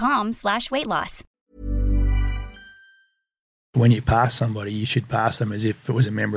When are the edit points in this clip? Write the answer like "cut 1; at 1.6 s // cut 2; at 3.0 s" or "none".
cut 1; at 1.3 s // cut 2; at 3.7 s